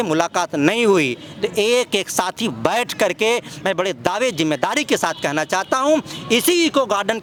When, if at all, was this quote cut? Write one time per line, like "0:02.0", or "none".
none